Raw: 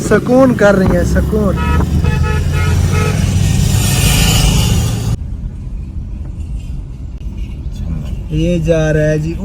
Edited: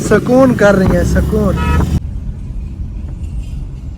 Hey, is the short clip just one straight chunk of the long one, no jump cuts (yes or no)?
no